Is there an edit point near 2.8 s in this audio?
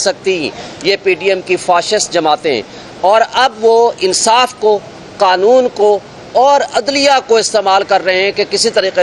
no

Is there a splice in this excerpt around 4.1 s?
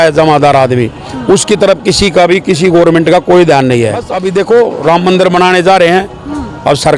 yes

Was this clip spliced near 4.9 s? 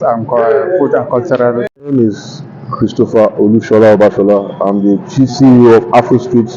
no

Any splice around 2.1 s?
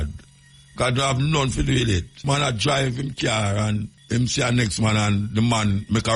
yes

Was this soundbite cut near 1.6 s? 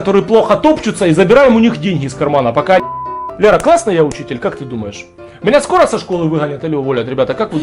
no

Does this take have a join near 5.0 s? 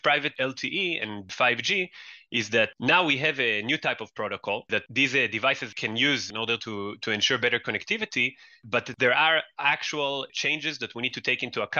no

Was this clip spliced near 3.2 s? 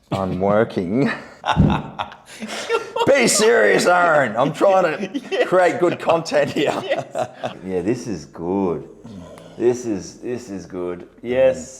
no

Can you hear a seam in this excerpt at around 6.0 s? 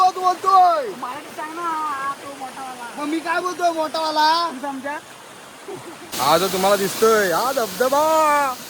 yes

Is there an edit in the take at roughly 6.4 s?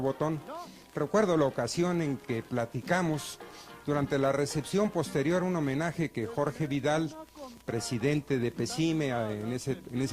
yes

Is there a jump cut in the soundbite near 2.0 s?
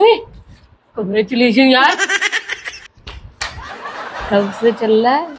no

